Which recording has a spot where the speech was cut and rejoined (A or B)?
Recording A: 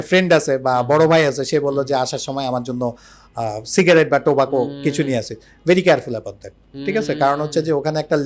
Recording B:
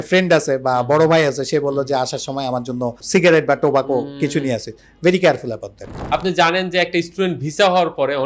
B